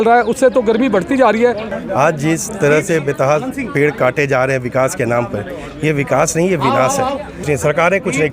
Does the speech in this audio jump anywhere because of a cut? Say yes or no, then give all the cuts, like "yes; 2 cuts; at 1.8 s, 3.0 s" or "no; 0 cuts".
yes; 2 cuts; at 1.7 s, 7.4 s